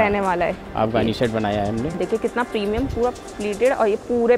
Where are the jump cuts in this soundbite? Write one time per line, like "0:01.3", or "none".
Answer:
0:02.0

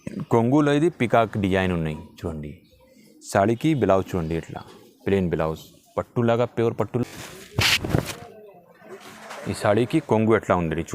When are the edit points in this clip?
0:07.0

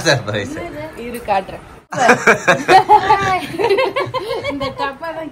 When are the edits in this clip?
0:02.0

